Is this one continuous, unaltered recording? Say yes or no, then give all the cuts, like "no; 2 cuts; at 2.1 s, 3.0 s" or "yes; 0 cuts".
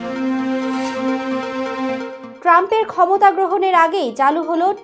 no; 1 cut; at 2.2 s